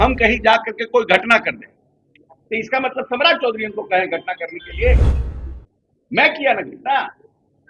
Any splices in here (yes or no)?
no